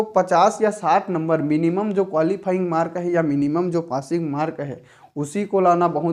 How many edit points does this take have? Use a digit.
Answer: 0